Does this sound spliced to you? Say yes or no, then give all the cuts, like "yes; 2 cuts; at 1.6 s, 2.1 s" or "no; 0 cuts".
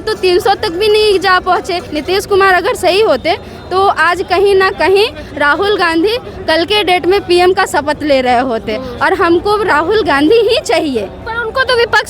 yes; 1 cut; at 1.9 s